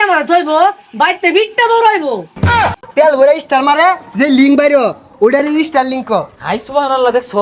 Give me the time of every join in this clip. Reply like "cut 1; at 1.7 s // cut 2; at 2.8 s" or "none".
cut 1; at 2.6 s